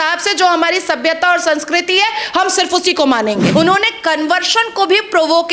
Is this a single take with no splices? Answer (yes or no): no